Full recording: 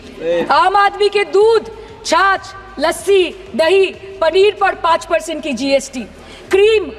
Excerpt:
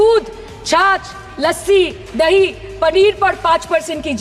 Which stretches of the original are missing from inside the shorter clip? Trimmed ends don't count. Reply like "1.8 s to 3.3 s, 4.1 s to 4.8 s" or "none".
none